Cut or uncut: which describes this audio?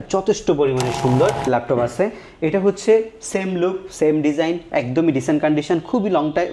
cut